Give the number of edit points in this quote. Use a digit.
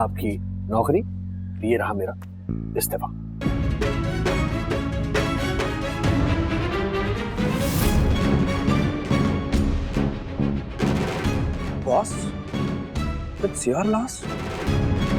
0